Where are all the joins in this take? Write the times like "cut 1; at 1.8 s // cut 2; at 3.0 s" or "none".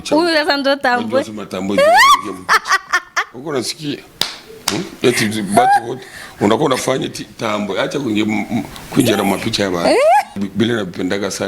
cut 1; at 10.4 s